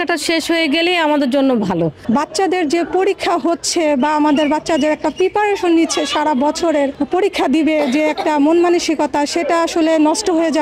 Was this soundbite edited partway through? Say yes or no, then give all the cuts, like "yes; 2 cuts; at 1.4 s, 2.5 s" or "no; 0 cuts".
yes; 2 cuts; at 2.0 s, 7.0 s